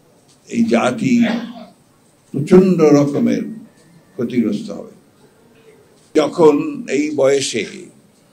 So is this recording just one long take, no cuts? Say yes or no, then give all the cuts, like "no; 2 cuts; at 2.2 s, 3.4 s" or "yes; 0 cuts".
no; 1 cut; at 6.1 s